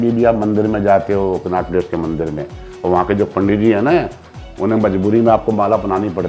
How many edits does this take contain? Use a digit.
0